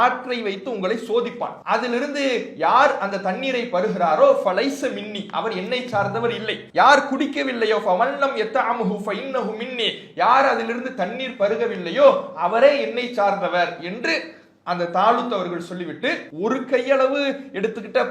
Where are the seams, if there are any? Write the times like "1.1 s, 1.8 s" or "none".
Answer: 1.6 s, 6.6 s